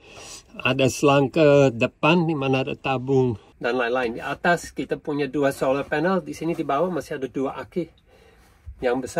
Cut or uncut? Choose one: cut